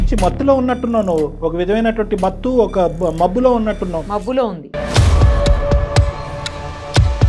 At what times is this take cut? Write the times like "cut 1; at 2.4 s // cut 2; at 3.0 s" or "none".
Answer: none